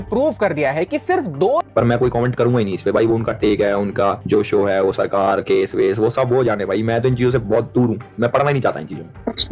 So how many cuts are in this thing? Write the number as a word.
one